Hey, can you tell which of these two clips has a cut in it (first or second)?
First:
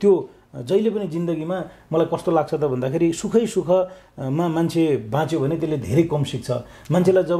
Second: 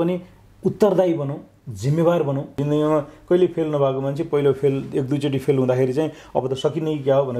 second